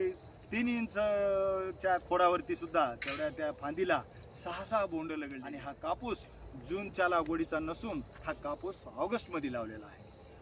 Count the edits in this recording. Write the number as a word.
one